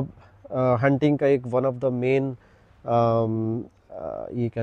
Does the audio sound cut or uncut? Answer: uncut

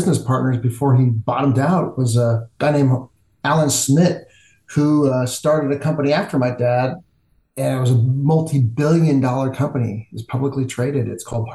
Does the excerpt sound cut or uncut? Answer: uncut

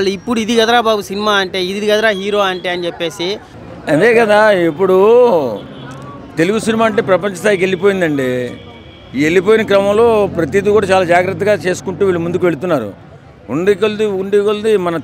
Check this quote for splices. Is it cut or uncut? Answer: cut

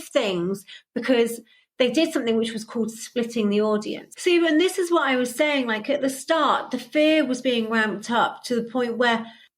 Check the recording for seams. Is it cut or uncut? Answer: cut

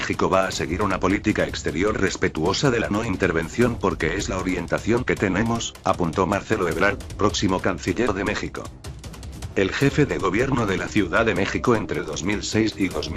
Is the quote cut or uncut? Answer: cut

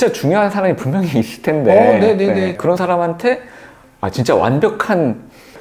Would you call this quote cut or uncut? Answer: cut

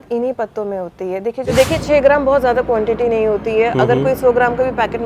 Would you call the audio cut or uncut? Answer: cut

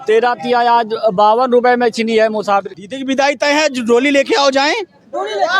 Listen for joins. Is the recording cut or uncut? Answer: cut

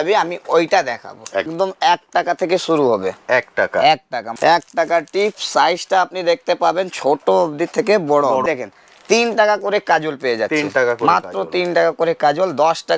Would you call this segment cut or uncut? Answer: cut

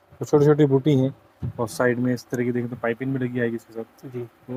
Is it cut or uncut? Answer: uncut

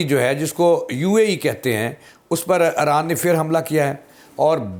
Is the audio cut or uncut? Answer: uncut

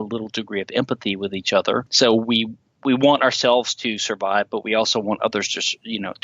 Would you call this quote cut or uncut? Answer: cut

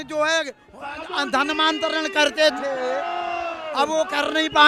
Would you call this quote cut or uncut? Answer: uncut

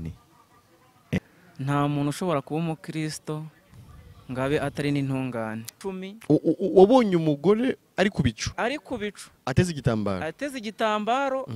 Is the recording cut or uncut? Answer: cut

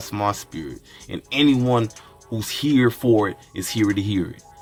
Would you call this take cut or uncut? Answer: uncut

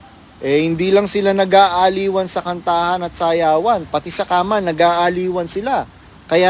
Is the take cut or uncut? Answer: uncut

